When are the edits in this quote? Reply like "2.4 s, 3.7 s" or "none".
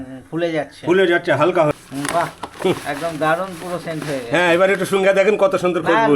1.8 s